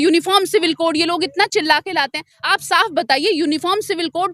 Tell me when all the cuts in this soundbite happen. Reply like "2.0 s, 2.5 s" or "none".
none